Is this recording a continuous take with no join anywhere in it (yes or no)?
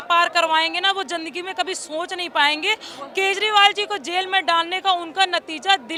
yes